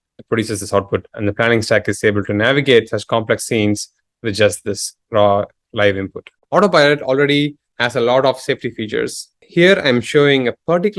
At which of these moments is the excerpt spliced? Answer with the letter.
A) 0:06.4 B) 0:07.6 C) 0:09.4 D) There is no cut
A